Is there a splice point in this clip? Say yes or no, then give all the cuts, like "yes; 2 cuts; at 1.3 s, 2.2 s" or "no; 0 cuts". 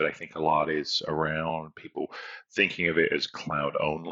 no; 0 cuts